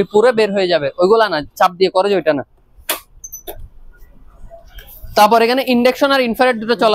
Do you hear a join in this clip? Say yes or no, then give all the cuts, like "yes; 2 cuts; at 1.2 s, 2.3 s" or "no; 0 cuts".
no; 0 cuts